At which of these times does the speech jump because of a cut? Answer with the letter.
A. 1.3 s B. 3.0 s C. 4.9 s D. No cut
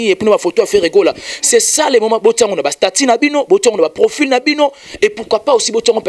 D